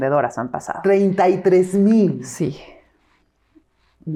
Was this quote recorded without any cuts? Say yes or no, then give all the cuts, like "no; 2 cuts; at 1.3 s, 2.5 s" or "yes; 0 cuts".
yes; 0 cuts